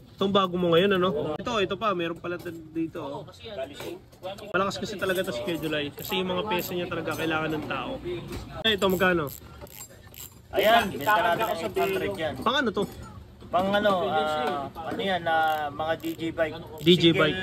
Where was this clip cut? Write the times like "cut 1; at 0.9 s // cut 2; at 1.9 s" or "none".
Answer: cut 1; at 1.4 s // cut 2; at 8.7 s